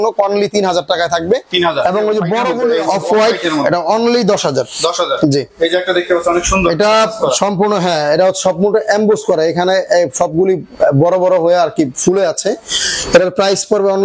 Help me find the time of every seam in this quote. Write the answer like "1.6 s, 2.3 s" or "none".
2.5 s